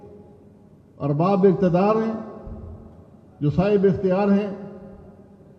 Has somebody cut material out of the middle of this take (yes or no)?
no